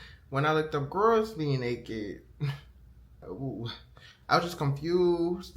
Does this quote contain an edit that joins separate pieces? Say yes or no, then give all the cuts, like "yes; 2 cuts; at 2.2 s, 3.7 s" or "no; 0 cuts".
yes; 1 cut; at 3.2 s